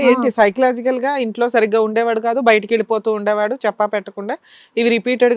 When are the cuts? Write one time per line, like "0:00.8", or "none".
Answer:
none